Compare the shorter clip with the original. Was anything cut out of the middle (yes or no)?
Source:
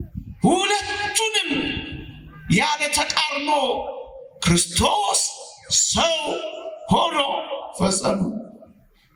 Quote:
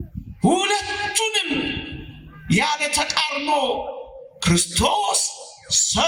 no